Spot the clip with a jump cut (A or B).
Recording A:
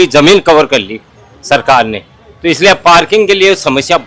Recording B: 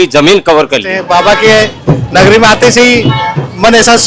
B